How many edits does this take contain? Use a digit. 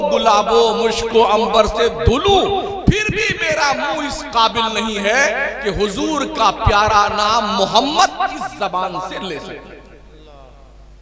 0